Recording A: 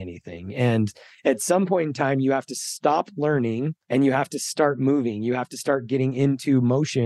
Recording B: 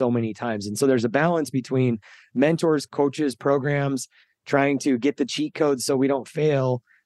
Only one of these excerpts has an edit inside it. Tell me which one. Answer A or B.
B